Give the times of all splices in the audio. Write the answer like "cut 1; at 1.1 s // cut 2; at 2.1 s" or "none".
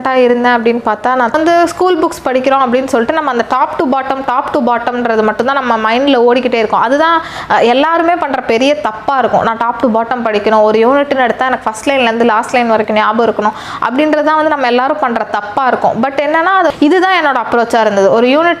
cut 1; at 1.3 s // cut 2; at 16.7 s